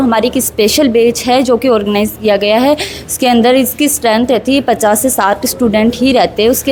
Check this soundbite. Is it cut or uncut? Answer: uncut